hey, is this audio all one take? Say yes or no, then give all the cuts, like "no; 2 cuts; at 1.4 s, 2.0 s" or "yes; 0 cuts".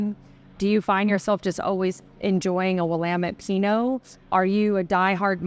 yes; 0 cuts